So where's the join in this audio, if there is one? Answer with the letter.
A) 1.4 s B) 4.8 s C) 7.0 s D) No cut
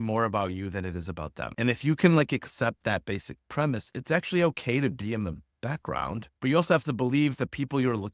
A